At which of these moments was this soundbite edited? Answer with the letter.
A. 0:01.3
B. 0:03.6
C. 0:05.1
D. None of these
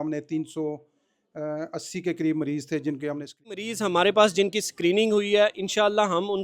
B